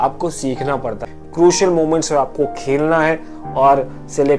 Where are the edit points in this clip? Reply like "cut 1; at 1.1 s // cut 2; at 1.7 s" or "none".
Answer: cut 1; at 1.1 s